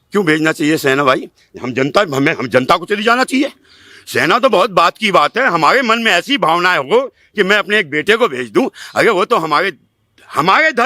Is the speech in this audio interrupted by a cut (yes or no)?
no